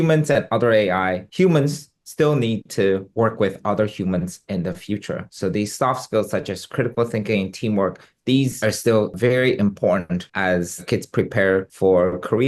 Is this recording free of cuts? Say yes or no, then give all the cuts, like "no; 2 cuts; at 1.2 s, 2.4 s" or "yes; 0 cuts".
yes; 0 cuts